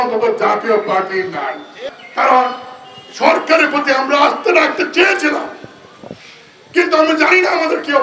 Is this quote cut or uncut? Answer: cut